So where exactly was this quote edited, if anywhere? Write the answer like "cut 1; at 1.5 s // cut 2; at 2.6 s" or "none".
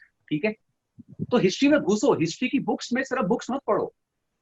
none